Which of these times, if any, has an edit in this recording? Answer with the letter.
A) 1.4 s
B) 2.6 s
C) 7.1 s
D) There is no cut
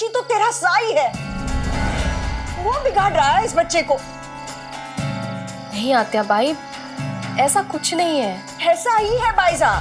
A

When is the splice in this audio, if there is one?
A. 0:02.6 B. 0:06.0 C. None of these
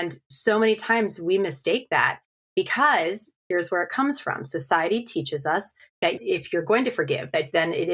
B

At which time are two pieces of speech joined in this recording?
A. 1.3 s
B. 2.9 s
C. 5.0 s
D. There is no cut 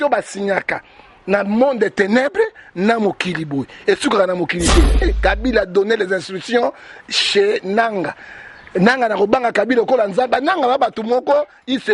C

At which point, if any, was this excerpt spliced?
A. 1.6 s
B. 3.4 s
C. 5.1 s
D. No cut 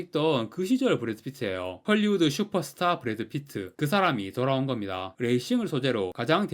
C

